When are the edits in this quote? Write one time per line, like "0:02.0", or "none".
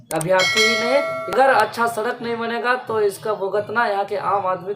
0:01.3